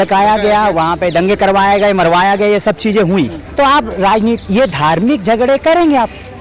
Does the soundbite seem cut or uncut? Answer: cut